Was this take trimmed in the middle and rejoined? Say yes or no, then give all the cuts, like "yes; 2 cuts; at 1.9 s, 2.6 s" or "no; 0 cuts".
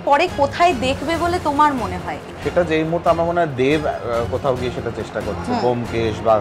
yes; 1 cut; at 2.1 s